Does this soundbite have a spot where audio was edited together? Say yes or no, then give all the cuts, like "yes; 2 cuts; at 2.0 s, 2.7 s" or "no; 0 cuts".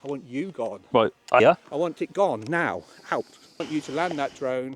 yes; 2 cuts; at 1.4 s, 3.6 s